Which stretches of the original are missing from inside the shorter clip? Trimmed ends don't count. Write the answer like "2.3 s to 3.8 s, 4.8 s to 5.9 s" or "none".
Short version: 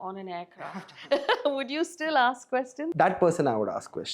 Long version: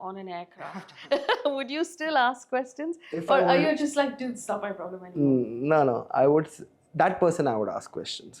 2.8 s to 6.8 s